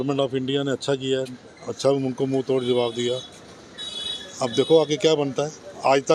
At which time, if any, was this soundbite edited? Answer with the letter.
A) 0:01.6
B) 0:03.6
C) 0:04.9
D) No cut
D